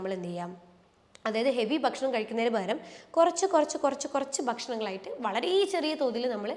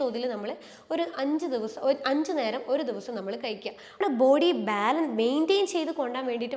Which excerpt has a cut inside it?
second; 1 cut; at 4.0 s

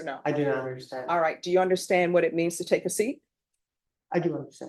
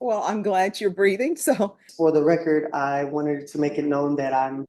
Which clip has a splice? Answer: second; 1 cut; at 1.8 s

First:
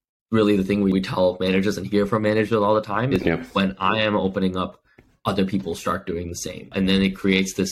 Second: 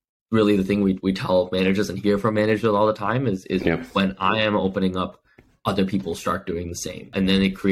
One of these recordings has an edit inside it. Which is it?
first; 2 cuts; at 0.9 s, 3.1 s

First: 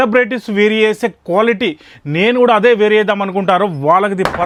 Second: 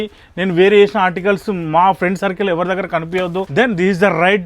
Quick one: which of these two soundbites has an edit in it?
second; 1 cut; at 3.5 s

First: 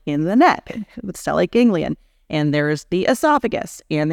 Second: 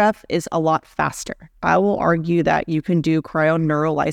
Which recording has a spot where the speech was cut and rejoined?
second; 1 cut; at 1.5 s

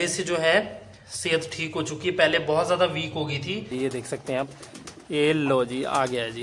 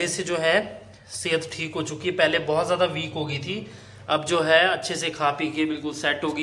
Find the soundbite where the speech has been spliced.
first; 1 cut; at 3.7 s

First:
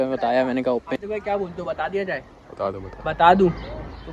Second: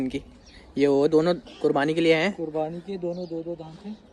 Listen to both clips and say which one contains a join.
first; 1 cut; at 1.0 s

